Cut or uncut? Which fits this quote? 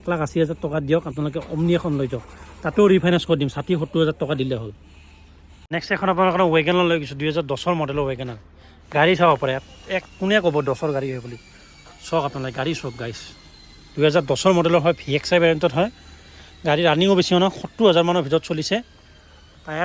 uncut